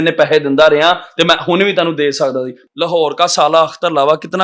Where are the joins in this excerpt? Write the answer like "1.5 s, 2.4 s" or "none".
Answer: 2.6 s

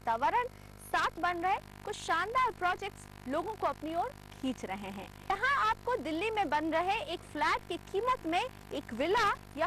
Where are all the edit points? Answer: 1.2 s, 5.3 s

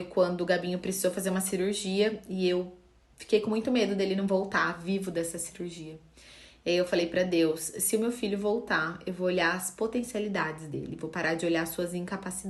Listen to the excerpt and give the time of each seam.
none

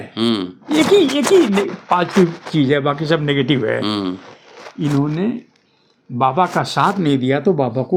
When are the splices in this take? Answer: none

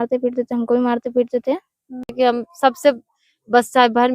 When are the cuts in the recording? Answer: 2.1 s

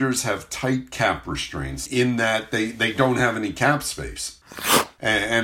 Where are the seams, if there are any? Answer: 1.8 s, 4.5 s

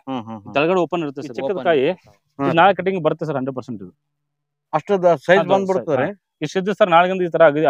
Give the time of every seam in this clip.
1.3 s

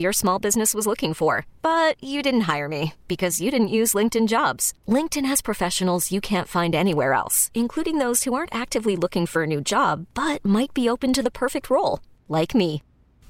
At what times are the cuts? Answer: none

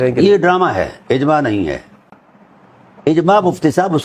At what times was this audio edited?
none

